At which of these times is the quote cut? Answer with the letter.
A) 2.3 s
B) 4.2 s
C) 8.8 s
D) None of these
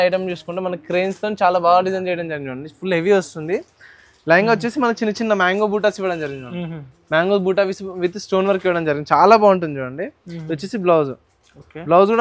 D